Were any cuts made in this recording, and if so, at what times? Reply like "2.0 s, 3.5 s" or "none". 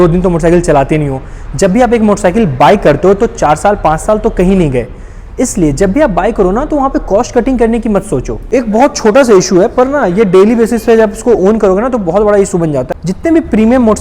8.3 s, 12.9 s